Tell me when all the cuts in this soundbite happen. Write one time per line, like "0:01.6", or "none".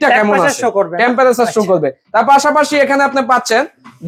none